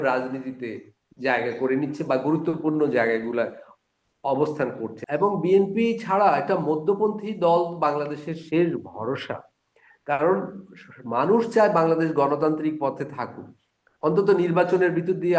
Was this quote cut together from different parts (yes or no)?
yes